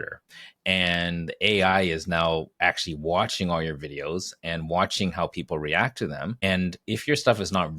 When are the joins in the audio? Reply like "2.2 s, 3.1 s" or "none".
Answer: 6.4 s